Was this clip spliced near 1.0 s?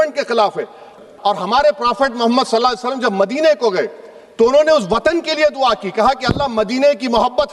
yes; 1 cut; at 1.0 s

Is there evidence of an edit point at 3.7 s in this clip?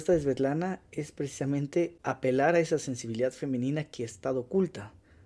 no; 1 cut; at 2.0 s

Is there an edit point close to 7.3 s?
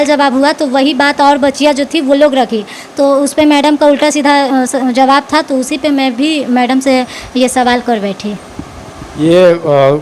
no; 0 cuts

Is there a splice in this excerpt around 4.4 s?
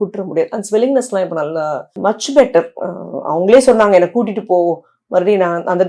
no; 1 cut; at 1.9 s

